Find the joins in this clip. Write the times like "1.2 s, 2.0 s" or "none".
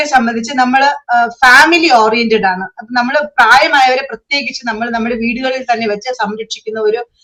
none